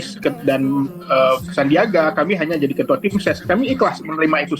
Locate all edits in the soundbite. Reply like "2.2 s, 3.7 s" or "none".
1.4 s